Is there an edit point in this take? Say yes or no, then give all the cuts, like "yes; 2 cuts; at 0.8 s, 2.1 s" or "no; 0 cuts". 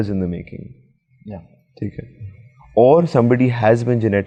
no; 0 cuts